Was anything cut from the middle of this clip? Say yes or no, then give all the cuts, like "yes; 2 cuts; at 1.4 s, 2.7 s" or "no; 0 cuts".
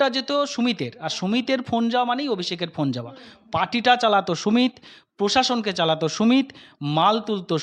no; 0 cuts